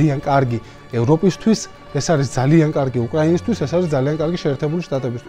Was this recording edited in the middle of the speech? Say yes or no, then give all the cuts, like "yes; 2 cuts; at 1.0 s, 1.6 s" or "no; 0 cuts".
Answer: no; 0 cuts